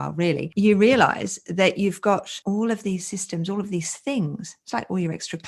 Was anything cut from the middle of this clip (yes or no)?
no